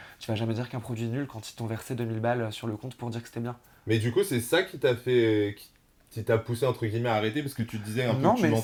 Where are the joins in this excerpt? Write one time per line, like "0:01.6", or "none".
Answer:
none